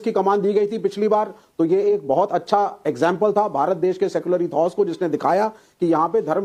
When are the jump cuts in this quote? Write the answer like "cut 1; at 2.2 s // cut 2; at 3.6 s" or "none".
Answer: none